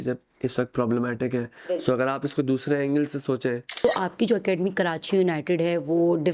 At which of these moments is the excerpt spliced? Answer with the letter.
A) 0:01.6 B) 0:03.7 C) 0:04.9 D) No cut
B